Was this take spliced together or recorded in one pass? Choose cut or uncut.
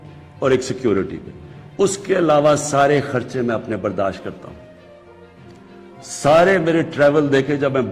uncut